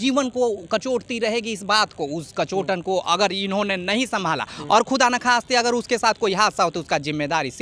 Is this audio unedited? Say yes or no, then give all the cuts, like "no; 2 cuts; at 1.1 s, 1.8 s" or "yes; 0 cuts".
yes; 0 cuts